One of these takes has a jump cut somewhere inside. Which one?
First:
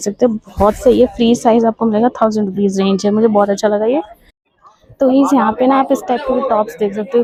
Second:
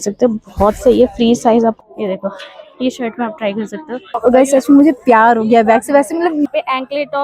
second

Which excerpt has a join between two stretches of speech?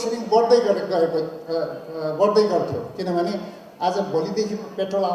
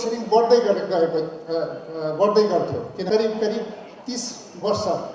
second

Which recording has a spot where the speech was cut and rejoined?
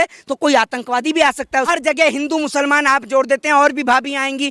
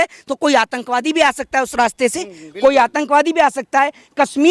first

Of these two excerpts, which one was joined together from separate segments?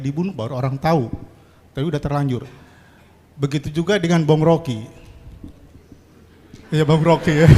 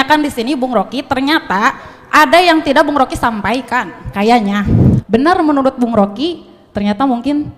second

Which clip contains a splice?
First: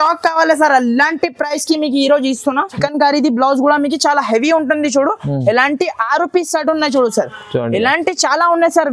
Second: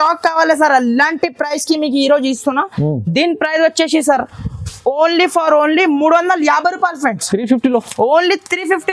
first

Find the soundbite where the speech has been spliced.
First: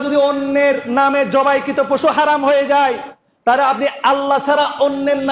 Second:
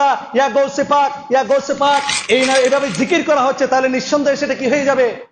second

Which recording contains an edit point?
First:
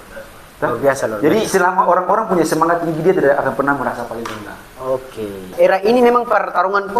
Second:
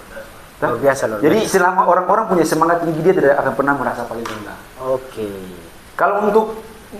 first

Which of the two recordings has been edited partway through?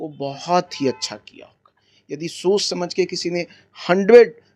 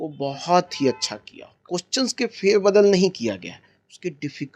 second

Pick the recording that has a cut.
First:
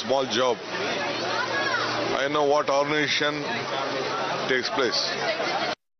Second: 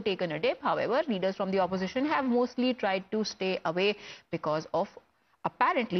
first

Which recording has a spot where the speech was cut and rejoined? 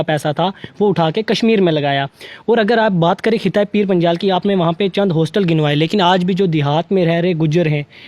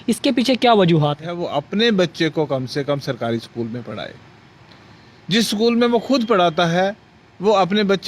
second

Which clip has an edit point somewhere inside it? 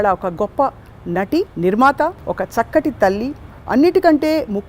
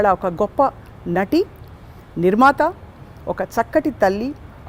first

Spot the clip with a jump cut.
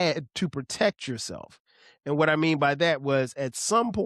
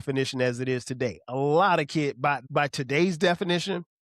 second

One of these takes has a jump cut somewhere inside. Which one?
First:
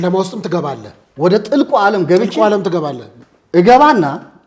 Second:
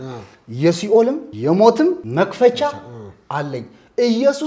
second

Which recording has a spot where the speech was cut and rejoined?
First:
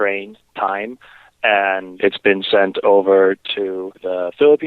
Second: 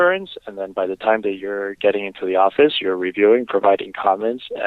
first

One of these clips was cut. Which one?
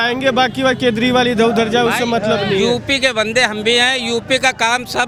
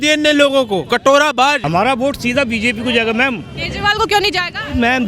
second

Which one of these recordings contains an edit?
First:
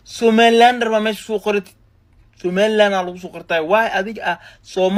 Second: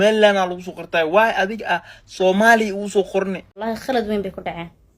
second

